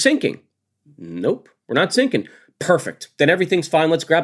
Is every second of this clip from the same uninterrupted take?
yes; 0 cuts

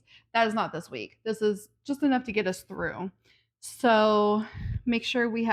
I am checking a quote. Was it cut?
no; 0 cuts

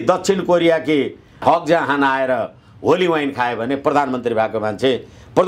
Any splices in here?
yes; 1 cut; at 1.4 s

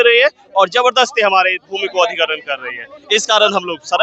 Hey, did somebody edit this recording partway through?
no; 0 cuts

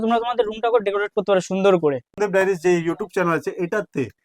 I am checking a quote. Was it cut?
yes; 1 cut; at 2.1 s

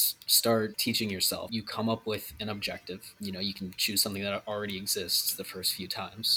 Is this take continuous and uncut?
no; 2 cuts; at 1.3 s, 3.1 s

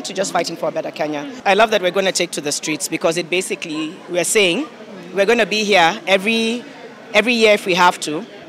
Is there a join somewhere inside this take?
yes; 1 cut; at 1.3 s

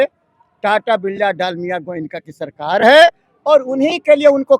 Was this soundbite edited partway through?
no; 0 cuts

